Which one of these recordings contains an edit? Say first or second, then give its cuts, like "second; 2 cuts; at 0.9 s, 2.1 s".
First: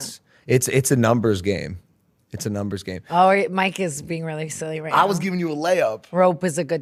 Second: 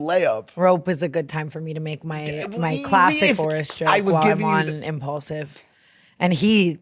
second; 1 cut; at 3.4 s